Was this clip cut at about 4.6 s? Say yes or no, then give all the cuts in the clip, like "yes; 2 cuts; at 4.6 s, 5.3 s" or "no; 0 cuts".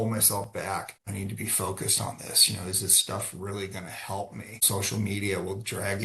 yes; 2 cuts; at 1.0 s, 4.6 s